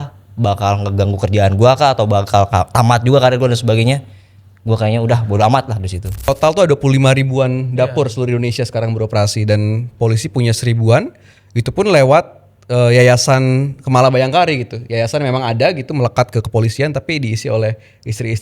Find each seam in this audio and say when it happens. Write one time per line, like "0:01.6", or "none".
0:06.3